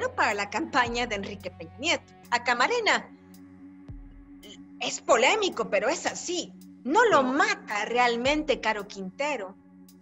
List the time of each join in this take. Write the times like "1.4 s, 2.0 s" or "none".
2.2 s